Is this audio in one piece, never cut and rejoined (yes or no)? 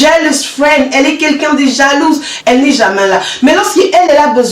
no